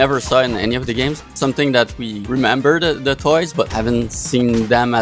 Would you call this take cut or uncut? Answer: cut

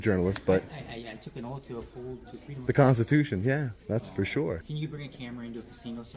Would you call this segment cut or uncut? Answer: cut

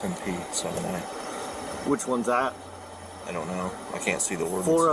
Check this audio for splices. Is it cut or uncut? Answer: uncut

